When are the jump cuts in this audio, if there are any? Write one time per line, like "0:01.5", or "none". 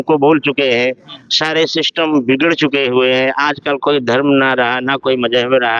none